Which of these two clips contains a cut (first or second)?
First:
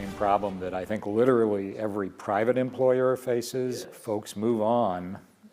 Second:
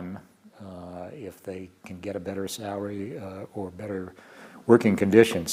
first